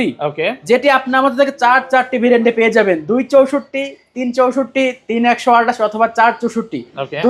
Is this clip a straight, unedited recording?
yes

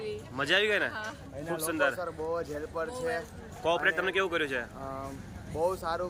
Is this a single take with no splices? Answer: yes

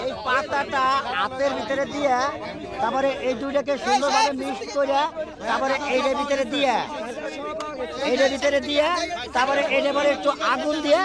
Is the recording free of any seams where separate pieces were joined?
yes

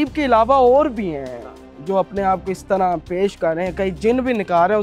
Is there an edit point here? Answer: no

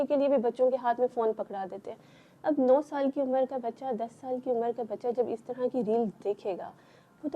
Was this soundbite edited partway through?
no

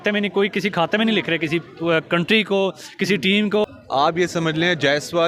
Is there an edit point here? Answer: yes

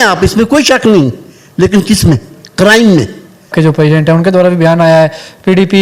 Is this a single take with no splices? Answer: no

